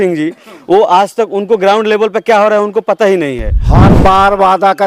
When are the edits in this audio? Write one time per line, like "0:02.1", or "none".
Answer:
0:03.8